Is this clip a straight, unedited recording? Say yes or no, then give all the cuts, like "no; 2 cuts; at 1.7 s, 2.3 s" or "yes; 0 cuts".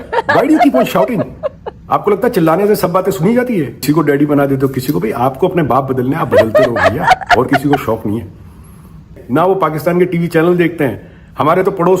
no; 2 cuts; at 3.8 s, 9.2 s